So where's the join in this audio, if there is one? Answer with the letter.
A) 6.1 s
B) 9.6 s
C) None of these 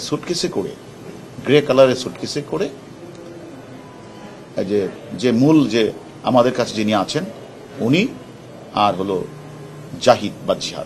C